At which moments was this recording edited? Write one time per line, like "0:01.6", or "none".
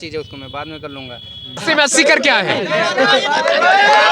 0:01.6